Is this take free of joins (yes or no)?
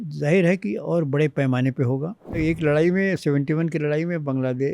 no